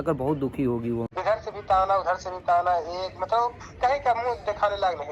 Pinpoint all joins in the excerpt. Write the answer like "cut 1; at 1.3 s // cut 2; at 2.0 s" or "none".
cut 1; at 1.1 s